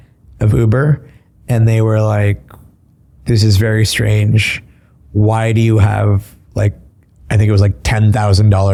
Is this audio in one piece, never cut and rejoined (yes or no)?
yes